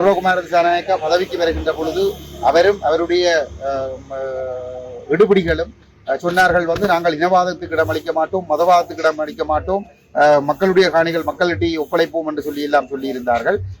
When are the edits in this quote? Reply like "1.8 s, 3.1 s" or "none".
none